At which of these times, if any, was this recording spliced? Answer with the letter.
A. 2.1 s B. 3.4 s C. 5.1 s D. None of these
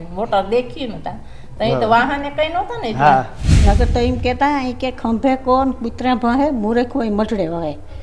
B